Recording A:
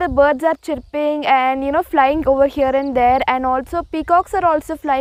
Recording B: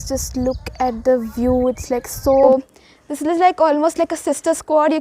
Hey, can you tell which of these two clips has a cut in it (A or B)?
B